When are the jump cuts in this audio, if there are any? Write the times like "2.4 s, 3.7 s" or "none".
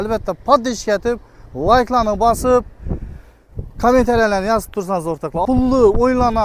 5.4 s